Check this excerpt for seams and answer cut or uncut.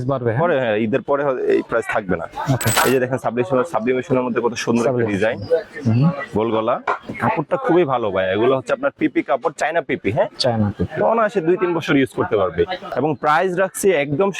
cut